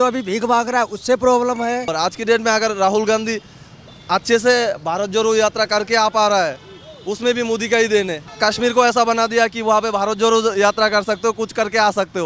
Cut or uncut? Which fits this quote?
cut